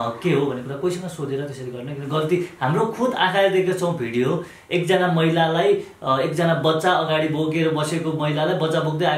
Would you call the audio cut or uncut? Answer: uncut